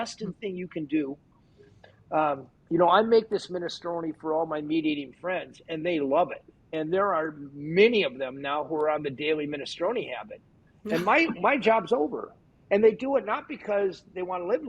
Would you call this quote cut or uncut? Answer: uncut